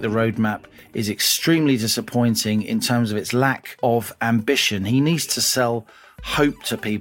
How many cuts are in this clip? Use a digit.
1